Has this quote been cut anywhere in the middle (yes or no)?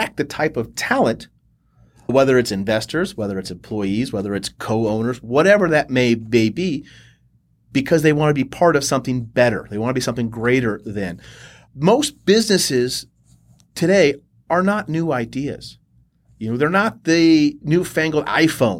yes